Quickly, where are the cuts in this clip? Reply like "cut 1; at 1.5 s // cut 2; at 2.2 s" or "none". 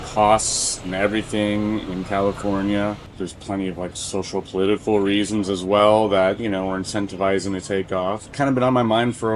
none